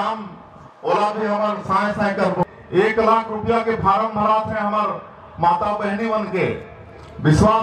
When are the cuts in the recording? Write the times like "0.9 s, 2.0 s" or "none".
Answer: 2.4 s